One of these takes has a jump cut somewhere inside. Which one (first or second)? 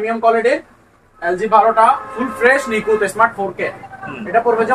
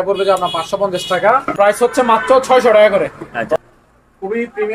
second